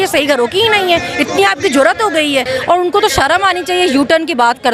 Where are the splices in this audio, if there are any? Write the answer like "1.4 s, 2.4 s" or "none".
2.5 s